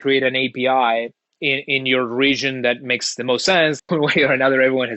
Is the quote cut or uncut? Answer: cut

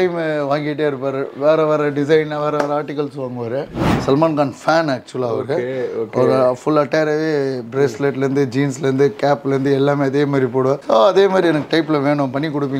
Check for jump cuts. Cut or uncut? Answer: cut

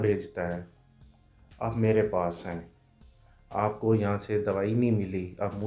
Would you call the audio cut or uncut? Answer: uncut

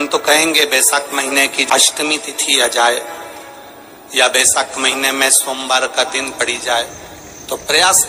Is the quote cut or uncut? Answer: cut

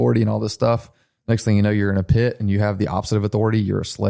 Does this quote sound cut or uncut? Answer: uncut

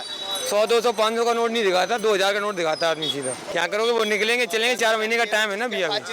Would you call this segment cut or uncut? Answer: cut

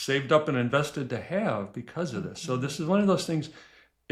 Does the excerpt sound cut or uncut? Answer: uncut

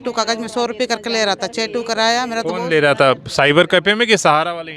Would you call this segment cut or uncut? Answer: uncut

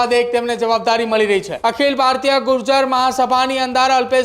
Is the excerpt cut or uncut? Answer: cut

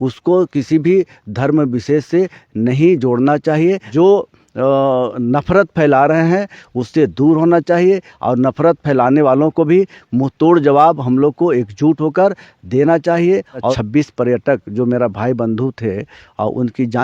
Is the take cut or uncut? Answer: cut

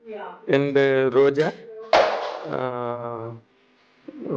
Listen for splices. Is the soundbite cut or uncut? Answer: uncut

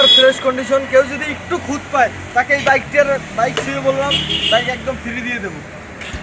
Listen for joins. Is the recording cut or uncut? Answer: uncut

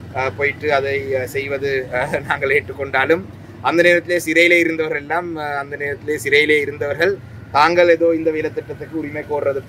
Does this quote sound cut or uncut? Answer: uncut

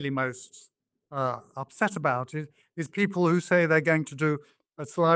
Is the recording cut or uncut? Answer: uncut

